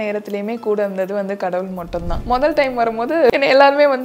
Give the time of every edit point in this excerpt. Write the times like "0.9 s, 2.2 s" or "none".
2.1 s, 3.3 s